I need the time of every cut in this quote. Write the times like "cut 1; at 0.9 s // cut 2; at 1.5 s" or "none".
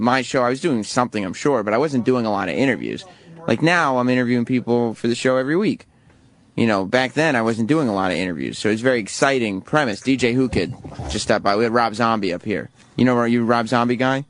cut 1; at 8.8 s